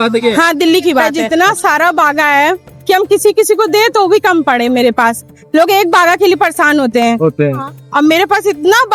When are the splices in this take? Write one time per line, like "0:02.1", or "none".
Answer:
0:01.1

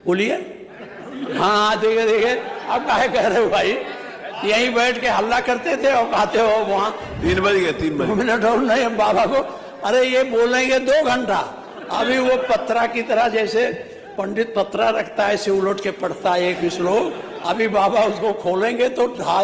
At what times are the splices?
0:07.2

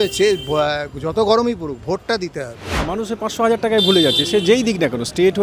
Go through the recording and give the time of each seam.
0:02.9

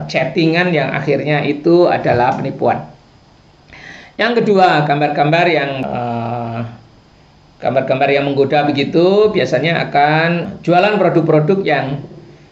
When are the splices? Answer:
0:05.7
0:10.5

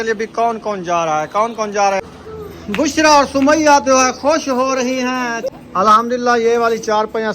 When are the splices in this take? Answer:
0:02.0
0:05.5

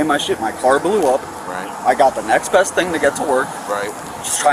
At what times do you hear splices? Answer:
none

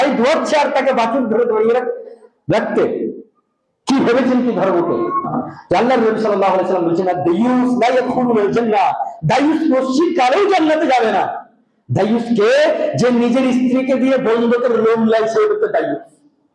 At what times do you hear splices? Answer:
0:05.3

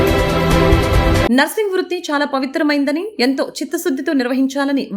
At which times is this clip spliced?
0:01.2

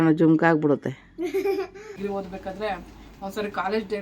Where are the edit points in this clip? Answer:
0:01.9

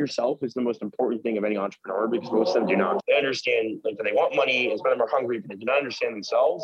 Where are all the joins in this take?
0:03.0

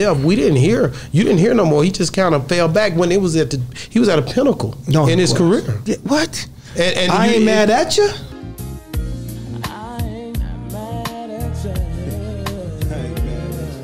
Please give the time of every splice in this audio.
none

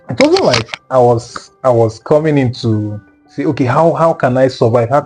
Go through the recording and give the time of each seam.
none

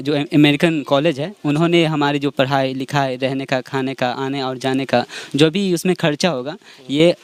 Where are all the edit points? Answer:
none

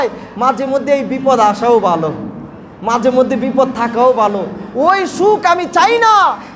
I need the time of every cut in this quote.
none

